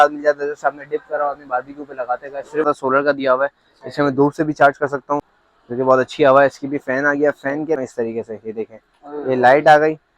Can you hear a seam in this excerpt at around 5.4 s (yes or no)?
yes